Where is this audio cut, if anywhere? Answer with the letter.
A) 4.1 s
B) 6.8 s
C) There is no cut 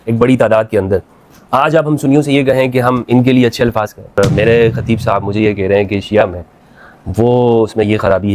A